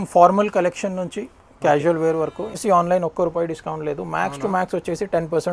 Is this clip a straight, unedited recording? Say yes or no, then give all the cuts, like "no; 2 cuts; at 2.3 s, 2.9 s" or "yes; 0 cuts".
no; 1 cut; at 2.6 s